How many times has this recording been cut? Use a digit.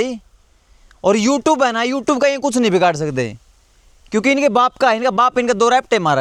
0